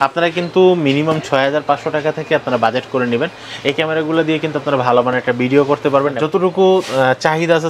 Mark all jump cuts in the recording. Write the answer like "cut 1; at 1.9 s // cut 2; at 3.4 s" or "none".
cut 1; at 6.2 s